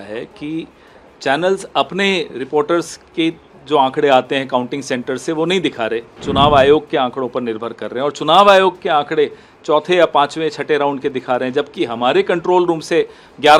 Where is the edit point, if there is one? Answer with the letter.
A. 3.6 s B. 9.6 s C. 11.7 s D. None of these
D